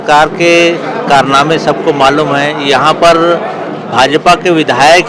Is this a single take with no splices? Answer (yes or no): yes